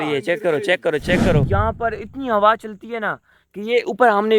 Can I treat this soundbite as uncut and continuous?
no; 1 cut; at 1.5 s

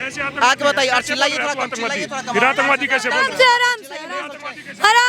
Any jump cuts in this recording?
no; 0 cuts

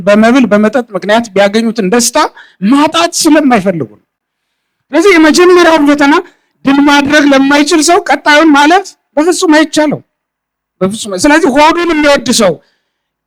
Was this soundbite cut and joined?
no; 0 cuts

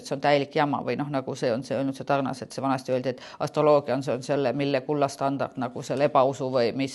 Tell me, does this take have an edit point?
no; 0 cuts

